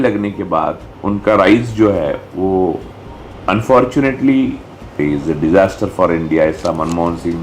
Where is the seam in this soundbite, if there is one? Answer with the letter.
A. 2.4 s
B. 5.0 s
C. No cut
B